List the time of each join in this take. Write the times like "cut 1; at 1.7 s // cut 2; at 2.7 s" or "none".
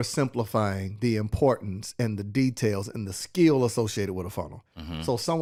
none

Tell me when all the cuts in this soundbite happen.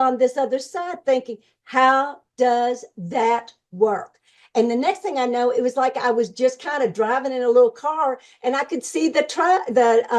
none

